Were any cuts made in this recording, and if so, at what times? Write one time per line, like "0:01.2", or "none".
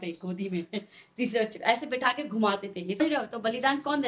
0:03.0